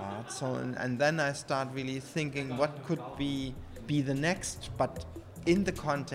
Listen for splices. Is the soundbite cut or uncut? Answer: uncut